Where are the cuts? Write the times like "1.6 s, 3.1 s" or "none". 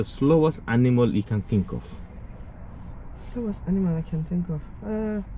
none